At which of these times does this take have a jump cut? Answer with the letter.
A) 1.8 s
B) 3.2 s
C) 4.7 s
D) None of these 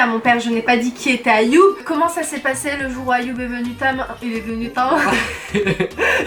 A